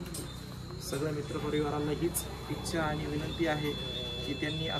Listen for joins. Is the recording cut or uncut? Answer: uncut